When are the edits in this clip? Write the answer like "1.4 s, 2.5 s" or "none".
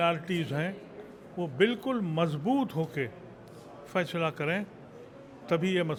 none